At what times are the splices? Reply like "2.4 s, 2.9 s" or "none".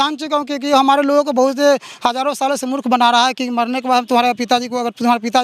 none

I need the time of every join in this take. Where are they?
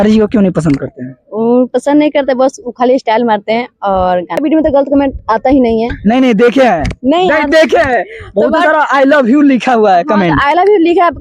4.4 s

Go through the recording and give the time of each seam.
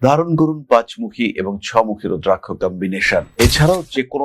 3.3 s

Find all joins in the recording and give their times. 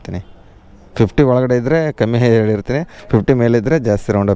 none

